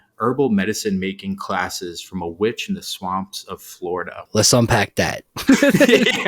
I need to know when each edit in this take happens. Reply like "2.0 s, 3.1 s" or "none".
4.2 s